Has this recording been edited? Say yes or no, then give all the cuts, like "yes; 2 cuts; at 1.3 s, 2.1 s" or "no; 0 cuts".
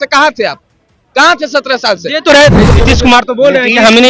yes; 1 cut; at 2.7 s